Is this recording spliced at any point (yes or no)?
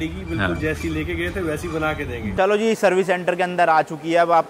yes